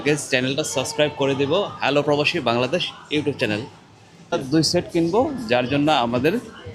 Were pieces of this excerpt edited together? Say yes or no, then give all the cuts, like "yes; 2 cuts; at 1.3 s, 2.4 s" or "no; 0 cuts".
yes; 1 cut; at 4.3 s